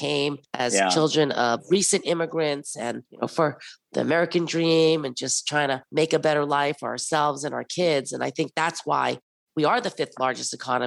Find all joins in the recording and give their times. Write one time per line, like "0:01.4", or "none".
none